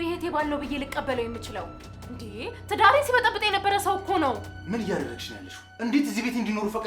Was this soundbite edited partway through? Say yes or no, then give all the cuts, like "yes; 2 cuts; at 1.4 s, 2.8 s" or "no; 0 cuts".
yes; 1 cut; at 4.5 s